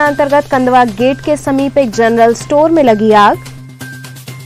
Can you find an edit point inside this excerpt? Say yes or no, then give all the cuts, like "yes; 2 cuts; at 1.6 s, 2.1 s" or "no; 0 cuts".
no; 0 cuts